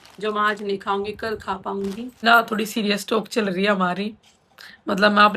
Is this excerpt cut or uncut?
cut